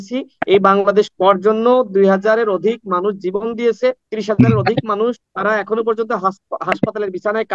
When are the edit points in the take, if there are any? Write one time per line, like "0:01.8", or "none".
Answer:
0:04.1
0:05.3